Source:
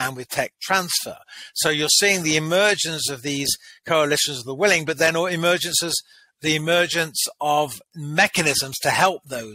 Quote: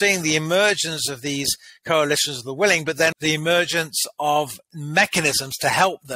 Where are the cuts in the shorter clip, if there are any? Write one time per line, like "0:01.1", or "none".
0:03.1